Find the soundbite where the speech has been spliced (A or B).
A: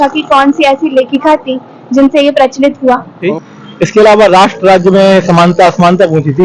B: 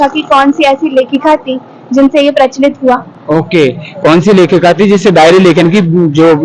A